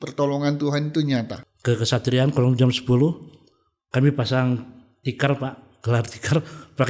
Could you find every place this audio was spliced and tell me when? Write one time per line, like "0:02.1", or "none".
0:01.4

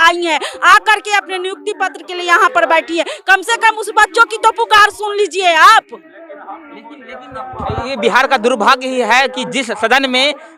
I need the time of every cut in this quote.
none

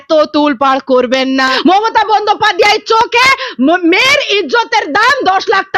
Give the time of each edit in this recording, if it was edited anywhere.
0:01.5

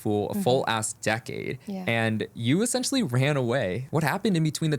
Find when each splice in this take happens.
0:03.8

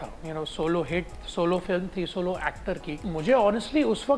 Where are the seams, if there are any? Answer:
0:03.0

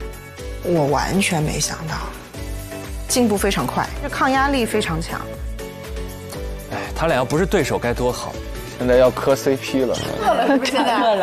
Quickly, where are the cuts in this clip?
none

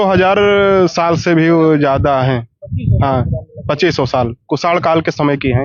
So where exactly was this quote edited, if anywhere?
none

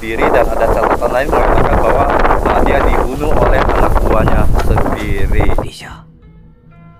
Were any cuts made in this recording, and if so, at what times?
none

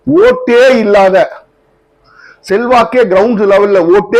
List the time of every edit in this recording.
none

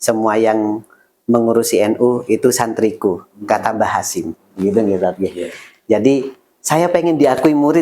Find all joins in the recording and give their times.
none

